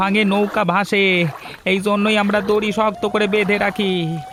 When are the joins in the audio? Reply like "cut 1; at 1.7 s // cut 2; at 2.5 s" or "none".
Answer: none